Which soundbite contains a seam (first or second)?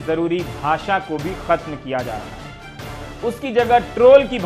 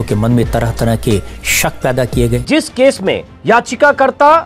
second